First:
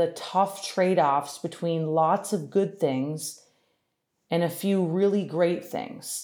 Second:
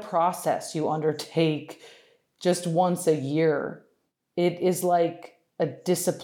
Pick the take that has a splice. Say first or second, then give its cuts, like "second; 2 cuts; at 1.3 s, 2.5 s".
second; 1 cut; at 4.6 s